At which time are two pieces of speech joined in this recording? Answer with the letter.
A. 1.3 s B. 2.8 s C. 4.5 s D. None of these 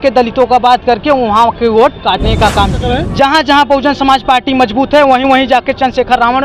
B